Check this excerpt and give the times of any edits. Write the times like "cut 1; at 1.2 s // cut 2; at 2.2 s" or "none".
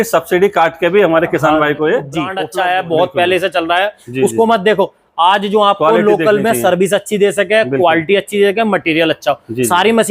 cut 1; at 2.4 s